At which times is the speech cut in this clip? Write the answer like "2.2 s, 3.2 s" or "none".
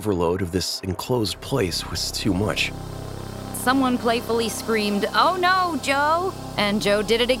3.3 s, 6.4 s